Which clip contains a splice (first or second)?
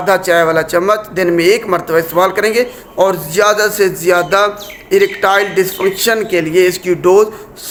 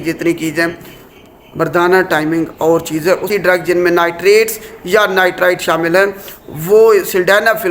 second